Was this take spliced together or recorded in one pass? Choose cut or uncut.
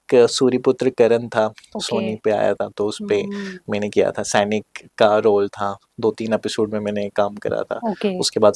uncut